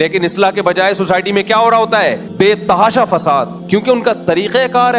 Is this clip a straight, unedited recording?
no; 2 cuts; at 2.2 s, 3.6 s

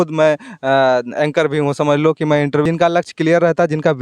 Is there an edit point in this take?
yes; 1 cut; at 2.6 s

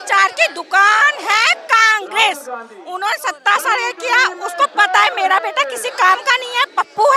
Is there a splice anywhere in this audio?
no; 0 cuts

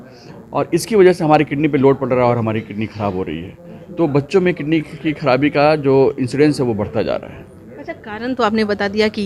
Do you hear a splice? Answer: no; 0 cuts

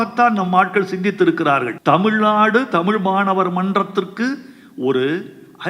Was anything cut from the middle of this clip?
yes; 1 cut; at 1.7 s

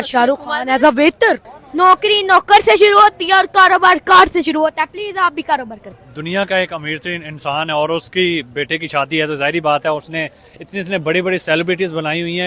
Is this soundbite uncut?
no; 2 cuts; at 1.6 s, 5.8 s

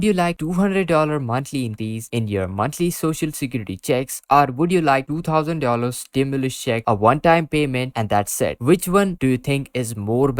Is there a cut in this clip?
no; 0 cuts

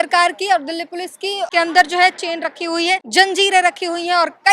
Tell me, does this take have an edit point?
yes; 2 cuts; at 1.5 s, 3.1 s

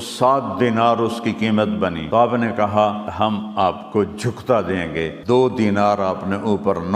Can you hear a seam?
yes; 3 cuts; at 2.2 s, 3.2 s, 5.2 s

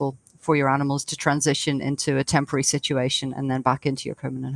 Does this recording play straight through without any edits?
yes; 0 cuts

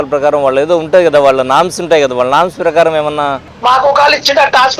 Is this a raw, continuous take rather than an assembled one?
no; 1 cut; at 3.5 s

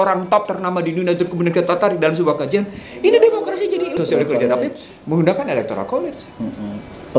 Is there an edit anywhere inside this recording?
yes; 1 cut; at 3.9 s

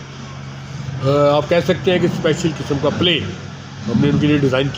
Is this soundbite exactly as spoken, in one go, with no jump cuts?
yes; 0 cuts

